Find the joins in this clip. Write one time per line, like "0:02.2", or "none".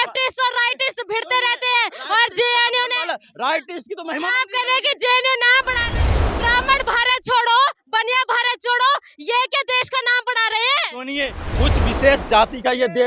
0:06.1